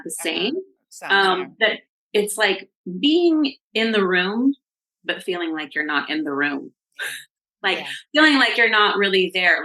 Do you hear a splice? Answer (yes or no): no